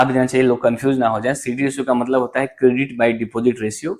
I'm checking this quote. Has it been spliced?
no; 0 cuts

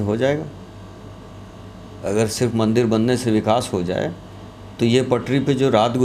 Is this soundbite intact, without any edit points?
yes; 0 cuts

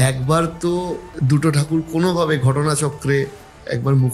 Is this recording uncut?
no; 1 cut; at 1.1 s

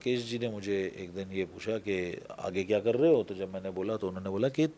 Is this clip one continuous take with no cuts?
yes; 0 cuts

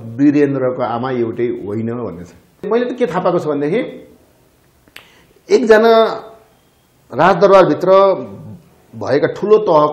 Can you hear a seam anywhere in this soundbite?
yes; 1 cut; at 2.7 s

